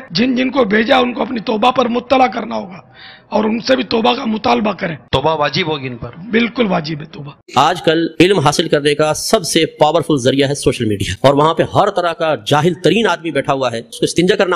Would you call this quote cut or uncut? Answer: cut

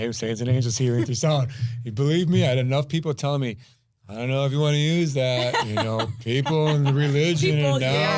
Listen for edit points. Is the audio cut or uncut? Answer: uncut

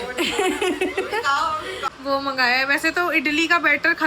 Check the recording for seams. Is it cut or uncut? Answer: cut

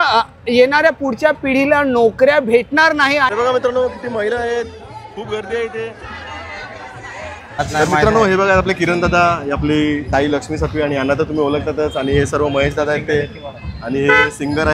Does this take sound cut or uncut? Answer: cut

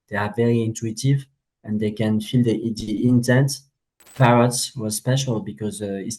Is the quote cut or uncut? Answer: cut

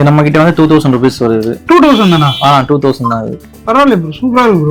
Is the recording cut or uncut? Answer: uncut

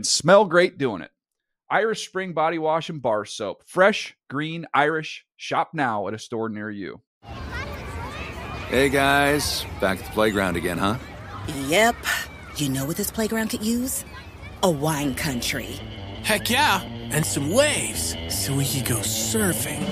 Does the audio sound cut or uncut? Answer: cut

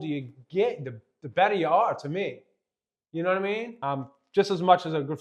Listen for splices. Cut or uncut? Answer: cut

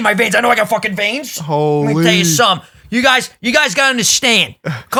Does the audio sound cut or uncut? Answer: uncut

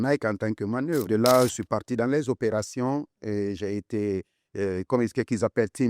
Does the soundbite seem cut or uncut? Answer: cut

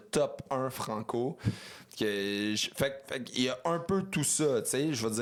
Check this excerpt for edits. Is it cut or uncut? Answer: uncut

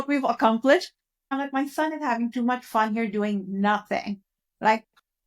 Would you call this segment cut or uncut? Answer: cut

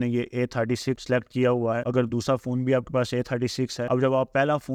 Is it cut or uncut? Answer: uncut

